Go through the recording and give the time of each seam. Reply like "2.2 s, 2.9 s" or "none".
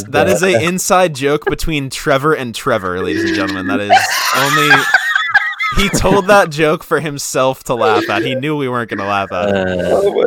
none